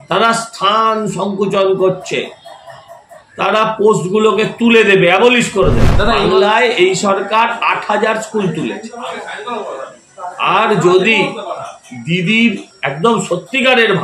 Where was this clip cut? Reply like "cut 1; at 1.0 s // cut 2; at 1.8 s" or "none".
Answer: cut 1; at 5.9 s // cut 2; at 12.7 s